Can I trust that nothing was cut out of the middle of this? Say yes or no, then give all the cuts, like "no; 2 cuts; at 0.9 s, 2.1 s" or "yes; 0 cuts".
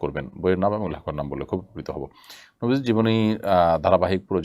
yes; 0 cuts